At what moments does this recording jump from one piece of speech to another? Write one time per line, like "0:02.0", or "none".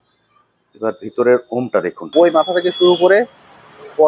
0:02.0

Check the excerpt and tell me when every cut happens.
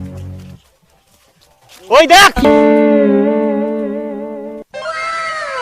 0:02.4

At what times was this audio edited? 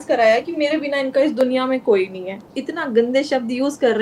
0:02.4

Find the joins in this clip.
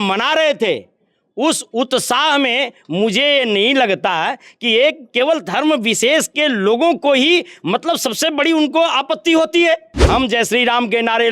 0:09.9

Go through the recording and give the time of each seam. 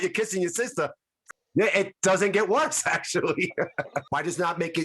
0:01.2
0:04.1

